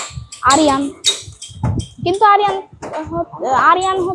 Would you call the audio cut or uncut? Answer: uncut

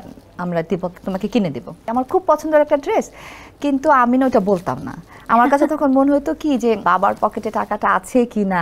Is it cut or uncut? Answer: cut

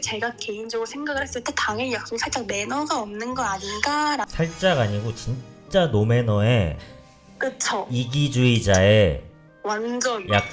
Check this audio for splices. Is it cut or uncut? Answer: cut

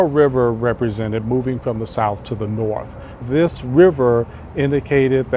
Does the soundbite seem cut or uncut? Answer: cut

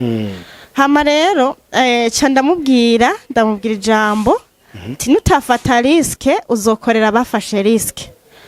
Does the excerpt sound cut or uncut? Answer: uncut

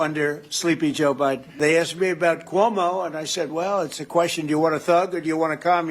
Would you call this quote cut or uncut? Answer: cut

